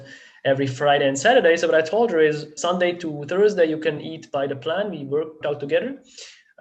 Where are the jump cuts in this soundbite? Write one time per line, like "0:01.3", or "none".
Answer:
0:02.5
0:04.1
0:05.4